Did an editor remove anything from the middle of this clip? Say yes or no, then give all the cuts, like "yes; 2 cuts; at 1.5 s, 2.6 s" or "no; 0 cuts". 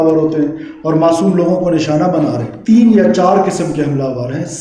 yes; 1 cut; at 2.5 s